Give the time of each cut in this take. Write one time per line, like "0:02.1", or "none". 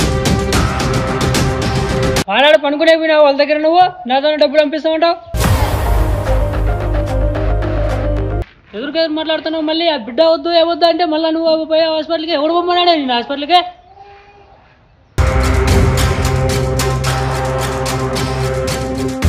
0:02.2
0:05.3
0:08.4